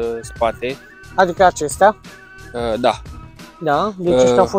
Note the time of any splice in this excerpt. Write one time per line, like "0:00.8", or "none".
none